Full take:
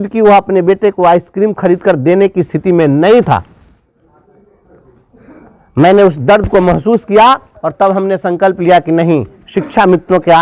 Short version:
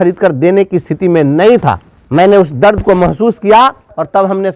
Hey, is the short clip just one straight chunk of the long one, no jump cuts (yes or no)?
no